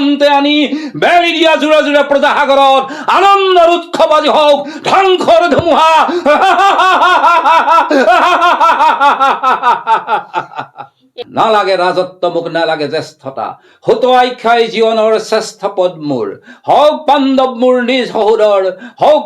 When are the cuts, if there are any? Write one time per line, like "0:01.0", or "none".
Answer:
0:11.2